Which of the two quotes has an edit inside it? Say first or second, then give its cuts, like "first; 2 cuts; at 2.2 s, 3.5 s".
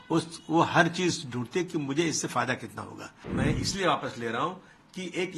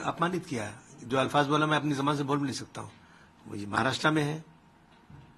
first; 1 cut; at 3.1 s